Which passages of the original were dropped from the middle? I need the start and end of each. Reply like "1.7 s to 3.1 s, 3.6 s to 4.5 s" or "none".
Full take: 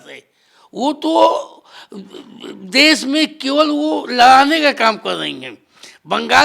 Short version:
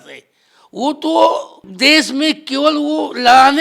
1.6 s to 2.5 s